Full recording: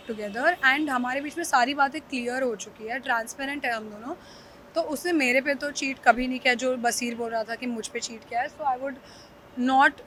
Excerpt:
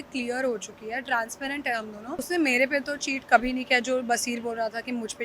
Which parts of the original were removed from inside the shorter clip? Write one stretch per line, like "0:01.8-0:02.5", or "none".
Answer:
0:04.2-0:05.0